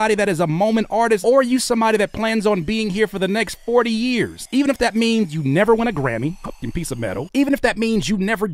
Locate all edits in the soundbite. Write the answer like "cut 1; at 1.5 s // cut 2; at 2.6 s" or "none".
cut 1; at 1.2 s // cut 2; at 4.4 s